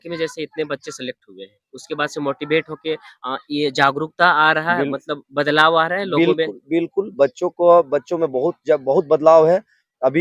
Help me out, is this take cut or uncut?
uncut